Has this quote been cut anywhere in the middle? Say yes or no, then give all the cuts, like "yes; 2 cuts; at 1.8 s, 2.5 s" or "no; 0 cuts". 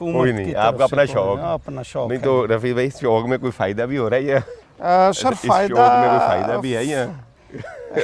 no; 0 cuts